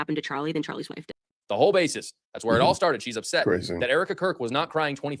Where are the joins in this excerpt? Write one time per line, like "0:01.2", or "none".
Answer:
0:01.0